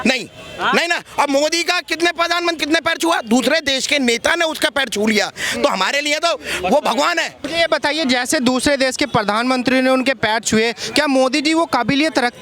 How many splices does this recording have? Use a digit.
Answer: 2